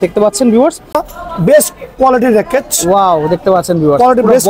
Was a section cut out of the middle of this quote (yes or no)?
yes